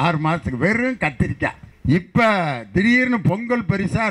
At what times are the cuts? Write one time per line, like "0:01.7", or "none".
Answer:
0:01.7